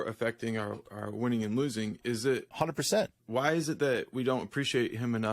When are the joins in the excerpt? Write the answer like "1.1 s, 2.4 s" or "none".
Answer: 3.2 s